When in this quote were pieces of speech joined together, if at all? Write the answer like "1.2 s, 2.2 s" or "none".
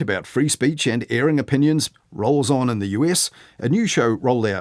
2.0 s